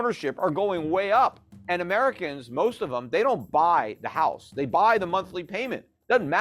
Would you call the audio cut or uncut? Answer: cut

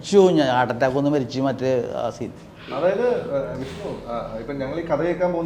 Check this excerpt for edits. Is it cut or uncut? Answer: uncut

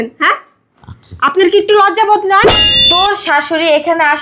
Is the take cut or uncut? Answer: cut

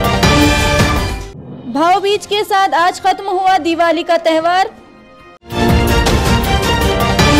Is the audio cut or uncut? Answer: uncut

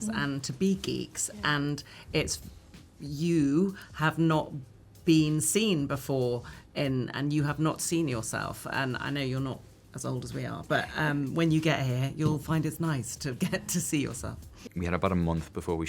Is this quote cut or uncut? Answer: cut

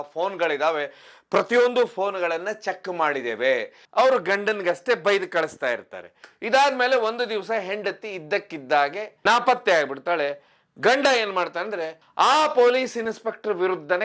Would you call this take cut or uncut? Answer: cut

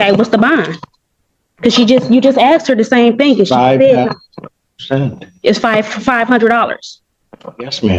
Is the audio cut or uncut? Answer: uncut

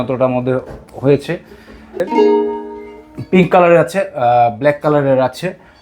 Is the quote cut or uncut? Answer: cut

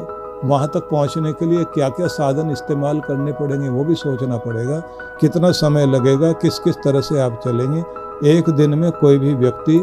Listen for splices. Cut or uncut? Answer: uncut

